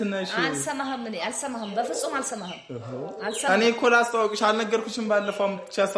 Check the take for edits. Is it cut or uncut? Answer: uncut